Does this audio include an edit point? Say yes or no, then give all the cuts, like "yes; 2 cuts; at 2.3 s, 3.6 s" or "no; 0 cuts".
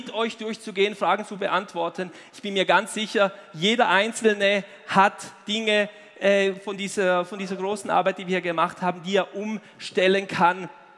no; 0 cuts